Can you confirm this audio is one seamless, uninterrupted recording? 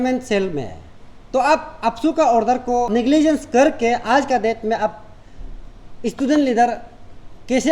no; 1 cut; at 2.9 s

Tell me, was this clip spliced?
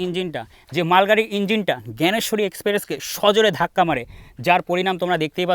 no; 0 cuts

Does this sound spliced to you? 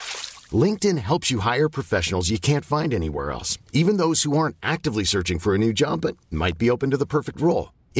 no; 0 cuts

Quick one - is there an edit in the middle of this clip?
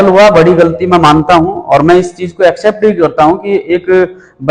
no; 0 cuts

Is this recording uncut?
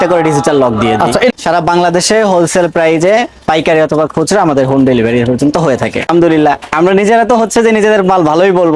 no; 2 cuts; at 1.3 s, 6.1 s

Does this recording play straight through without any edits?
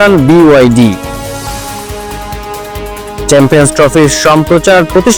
yes; 0 cuts

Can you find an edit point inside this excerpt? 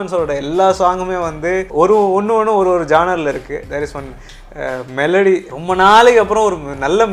yes; 3 cuts; at 1.7 s, 3.6 s, 5.5 s

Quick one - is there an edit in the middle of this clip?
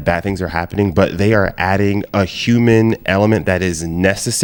no; 0 cuts

